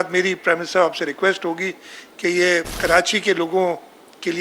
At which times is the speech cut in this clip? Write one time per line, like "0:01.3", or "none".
0:02.7